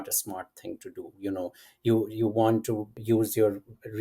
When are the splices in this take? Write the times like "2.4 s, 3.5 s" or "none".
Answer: 2.9 s